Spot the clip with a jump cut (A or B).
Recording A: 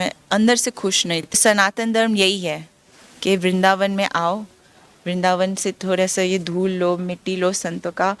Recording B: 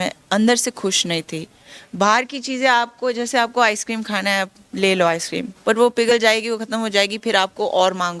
A